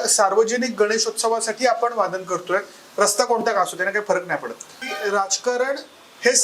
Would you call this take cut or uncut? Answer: cut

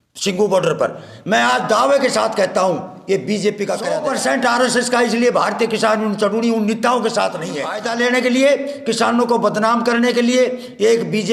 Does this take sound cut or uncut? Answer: cut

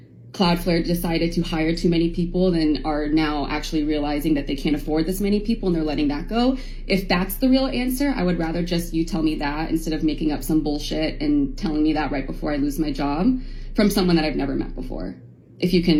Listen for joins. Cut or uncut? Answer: uncut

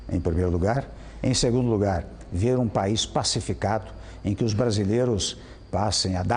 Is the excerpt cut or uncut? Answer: uncut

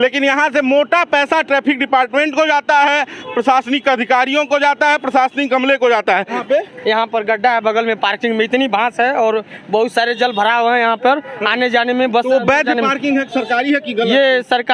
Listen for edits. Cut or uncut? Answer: cut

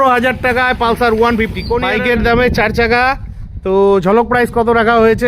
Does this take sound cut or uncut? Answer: cut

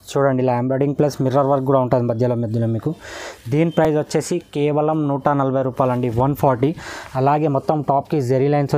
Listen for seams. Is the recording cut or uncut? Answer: uncut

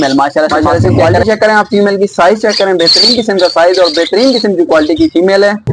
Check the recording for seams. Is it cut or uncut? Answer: cut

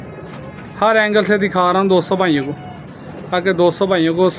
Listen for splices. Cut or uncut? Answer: uncut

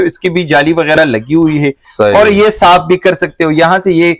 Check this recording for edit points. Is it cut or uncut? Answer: uncut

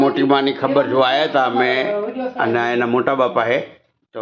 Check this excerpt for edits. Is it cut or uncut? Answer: cut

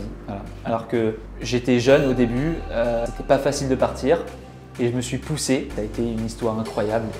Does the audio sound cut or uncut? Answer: cut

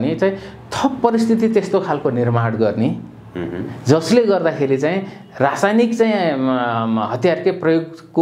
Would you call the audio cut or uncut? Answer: uncut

